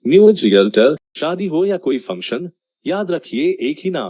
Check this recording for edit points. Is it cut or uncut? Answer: cut